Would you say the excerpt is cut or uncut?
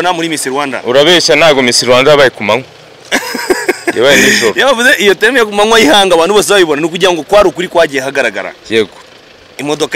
uncut